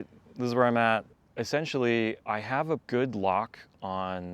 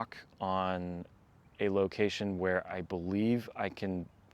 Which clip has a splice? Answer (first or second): first